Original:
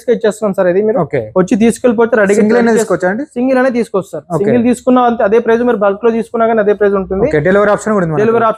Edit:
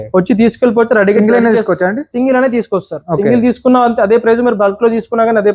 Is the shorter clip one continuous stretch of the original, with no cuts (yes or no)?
yes